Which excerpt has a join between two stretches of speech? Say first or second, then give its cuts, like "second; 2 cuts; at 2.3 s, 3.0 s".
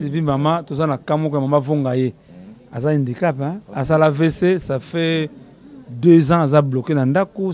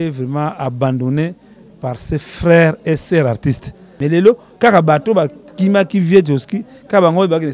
second; 1 cut; at 3.8 s